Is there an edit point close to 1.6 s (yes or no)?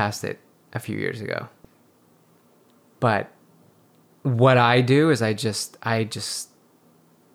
yes